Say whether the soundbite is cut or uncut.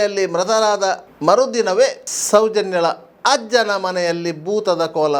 cut